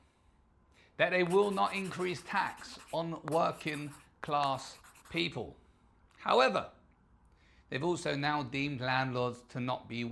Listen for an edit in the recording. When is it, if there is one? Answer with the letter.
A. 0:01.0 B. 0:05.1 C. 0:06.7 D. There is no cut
D